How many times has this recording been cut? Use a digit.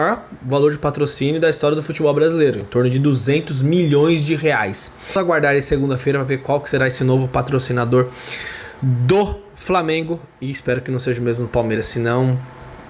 1